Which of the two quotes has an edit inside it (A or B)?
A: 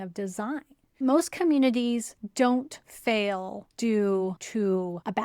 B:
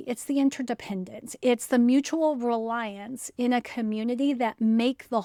A